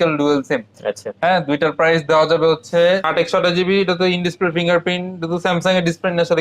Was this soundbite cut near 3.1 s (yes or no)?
yes